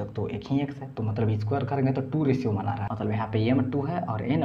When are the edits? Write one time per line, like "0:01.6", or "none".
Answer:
0:02.9